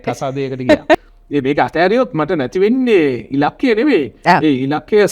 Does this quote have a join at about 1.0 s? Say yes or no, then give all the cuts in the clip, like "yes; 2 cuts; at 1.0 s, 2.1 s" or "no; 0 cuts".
yes; 1 cut; at 1.0 s